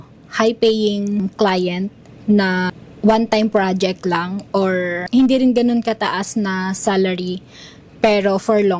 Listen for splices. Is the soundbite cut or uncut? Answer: cut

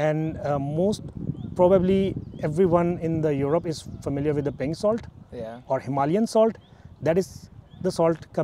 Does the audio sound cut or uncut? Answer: uncut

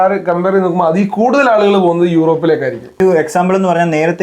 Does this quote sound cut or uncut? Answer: cut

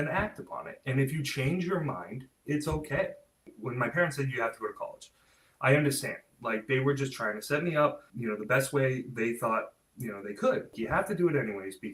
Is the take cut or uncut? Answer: cut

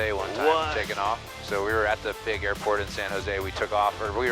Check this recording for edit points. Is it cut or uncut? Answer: uncut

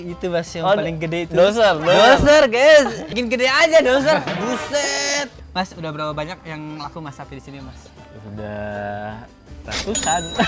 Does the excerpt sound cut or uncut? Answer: cut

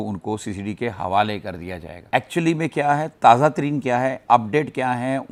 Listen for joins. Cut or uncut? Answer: uncut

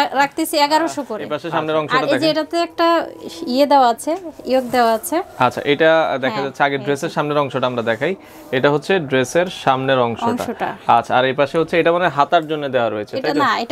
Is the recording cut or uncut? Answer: cut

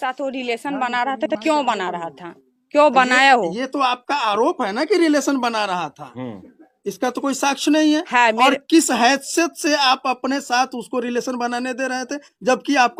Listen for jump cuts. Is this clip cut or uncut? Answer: uncut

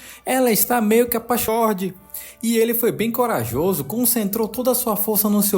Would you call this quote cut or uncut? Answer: cut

